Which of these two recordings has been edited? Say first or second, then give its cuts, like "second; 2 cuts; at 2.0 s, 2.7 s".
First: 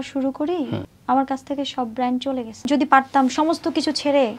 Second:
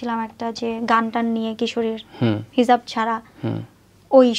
first; 2 cuts; at 0.9 s, 2.6 s